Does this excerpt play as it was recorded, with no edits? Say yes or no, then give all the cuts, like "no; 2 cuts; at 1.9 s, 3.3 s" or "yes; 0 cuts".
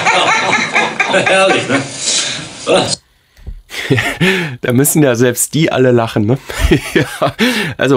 yes; 0 cuts